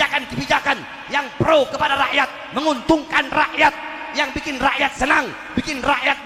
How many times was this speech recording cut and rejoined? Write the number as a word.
zero